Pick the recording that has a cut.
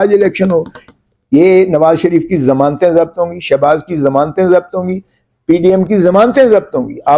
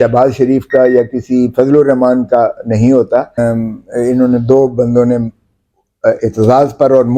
second; 1 cut; at 3.4 s

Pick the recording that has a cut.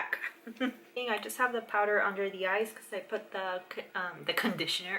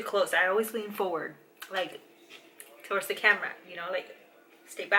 first; 1 cut; at 0.9 s

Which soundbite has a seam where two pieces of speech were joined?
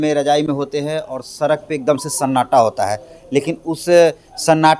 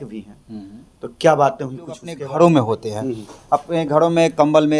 second; 1 cut; at 2.2 s

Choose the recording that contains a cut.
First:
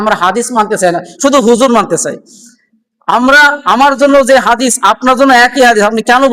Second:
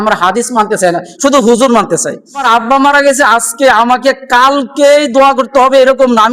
second; 1 cut; at 2.4 s

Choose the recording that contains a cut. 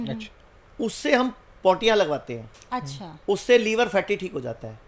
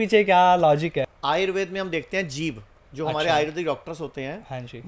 second; 1 cut; at 1.1 s

